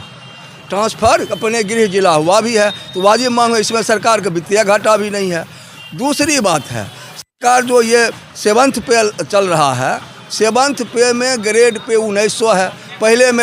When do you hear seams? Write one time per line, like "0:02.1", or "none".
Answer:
none